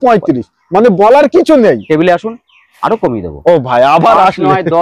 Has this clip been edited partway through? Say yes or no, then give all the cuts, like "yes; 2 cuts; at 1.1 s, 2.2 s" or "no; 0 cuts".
no; 0 cuts